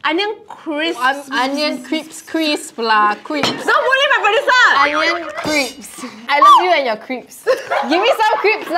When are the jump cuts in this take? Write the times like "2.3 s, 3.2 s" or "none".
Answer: 3.6 s, 6.2 s